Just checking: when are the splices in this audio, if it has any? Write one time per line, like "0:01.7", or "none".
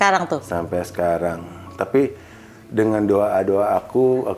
none